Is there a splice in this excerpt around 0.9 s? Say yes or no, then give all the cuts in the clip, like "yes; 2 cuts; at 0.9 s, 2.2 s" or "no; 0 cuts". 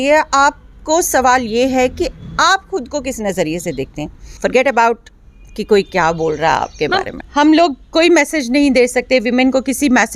no; 2 cuts; at 4.2 s, 7.2 s